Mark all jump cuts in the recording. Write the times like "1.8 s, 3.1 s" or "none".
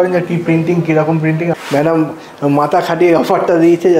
1.6 s